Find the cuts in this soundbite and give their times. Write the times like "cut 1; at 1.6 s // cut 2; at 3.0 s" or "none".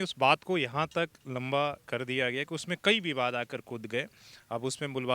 none